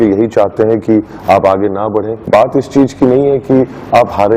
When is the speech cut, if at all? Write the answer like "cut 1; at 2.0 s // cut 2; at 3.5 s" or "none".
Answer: cut 1; at 2.3 s

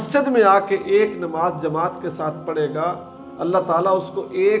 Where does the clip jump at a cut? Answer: none

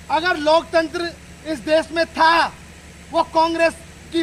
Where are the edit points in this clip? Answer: none

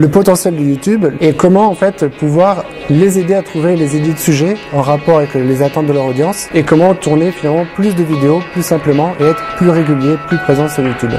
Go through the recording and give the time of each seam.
cut 1; at 1.2 s // cut 2; at 6.4 s

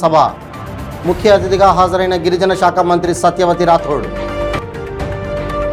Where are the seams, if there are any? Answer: none

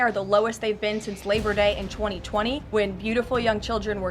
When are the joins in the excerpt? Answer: cut 1; at 2.6 s

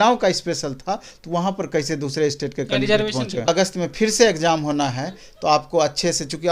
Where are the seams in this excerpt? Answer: cut 1; at 3.5 s

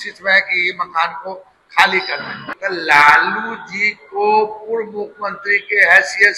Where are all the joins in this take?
cut 1; at 2.4 s

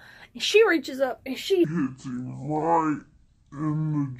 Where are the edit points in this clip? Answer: cut 1; at 1.6 s

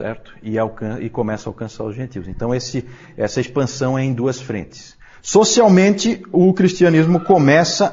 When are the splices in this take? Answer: cut 1; at 6.4 s

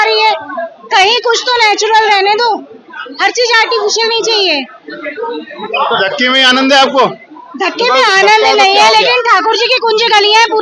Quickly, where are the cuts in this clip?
none

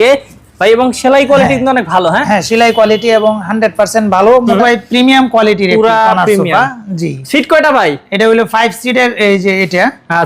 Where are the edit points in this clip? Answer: cut 1; at 4.6 s

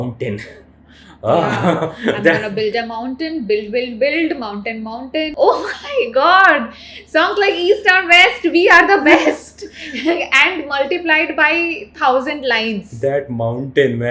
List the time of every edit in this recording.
cut 1; at 5.3 s

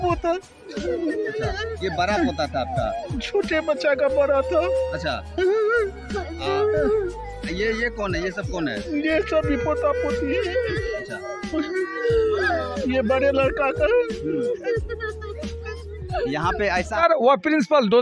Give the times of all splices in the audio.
cut 1; at 16.9 s

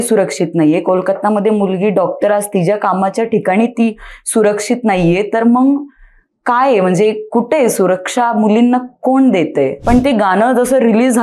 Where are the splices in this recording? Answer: cut 1; at 9.8 s

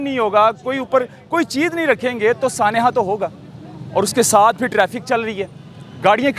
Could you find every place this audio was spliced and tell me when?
none

